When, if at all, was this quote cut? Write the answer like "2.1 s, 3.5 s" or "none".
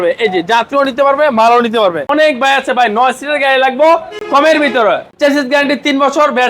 2.1 s, 4.2 s, 5.1 s